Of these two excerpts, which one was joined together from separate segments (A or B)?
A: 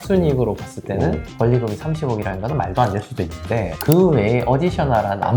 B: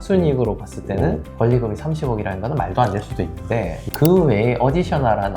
A